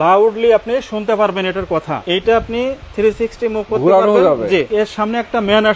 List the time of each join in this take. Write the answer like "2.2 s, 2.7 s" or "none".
2.0 s, 4.7 s